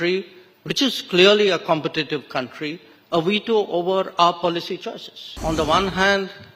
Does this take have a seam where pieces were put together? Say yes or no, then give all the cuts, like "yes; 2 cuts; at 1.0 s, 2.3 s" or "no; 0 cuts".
yes; 1 cut; at 5.4 s